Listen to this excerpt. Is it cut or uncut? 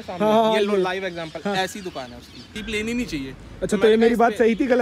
cut